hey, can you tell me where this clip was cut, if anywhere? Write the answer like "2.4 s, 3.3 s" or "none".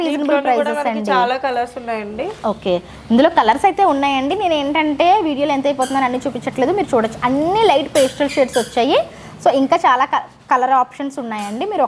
none

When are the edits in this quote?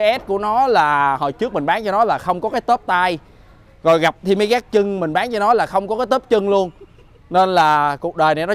none

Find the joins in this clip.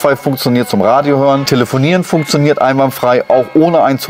1.5 s

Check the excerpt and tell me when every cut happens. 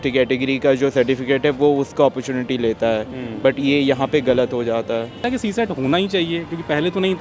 5.2 s

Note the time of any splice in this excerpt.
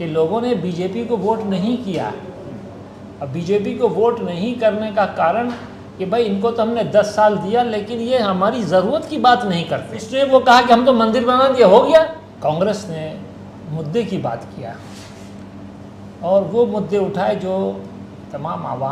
10.1 s, 12.2 s

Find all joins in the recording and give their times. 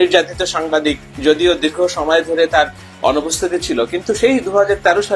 1.1 s

